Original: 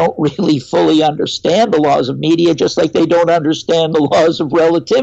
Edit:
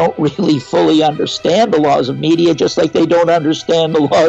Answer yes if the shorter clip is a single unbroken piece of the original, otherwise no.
yes